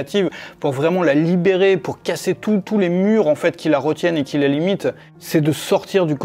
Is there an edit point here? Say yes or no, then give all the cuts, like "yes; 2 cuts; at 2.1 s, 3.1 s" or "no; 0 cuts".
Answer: yes; 1 cut; at 5.1 s